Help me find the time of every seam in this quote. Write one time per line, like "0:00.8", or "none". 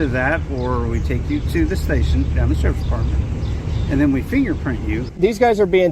0:05.0